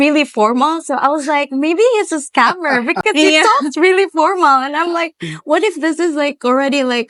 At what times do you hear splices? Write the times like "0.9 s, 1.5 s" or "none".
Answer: none